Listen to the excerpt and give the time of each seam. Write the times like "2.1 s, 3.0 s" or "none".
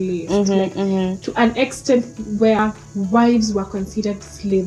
2.6 s